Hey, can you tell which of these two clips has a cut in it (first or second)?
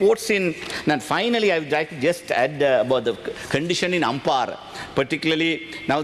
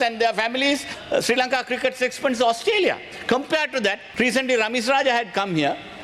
second